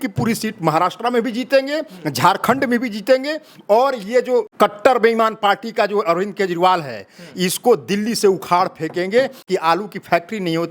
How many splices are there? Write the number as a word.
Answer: two